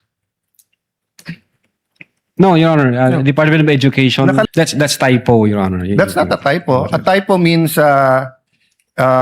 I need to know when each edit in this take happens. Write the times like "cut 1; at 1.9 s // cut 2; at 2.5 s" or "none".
cut 1; at 4.4 s